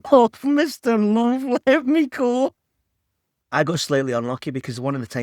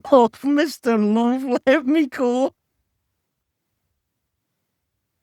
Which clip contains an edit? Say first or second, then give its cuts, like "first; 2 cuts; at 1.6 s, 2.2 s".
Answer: first; 1 cut; at 3.4 s